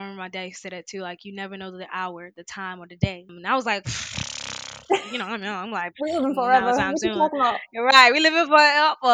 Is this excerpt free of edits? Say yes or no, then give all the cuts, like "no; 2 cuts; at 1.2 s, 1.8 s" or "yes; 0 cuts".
yes; 0 cuts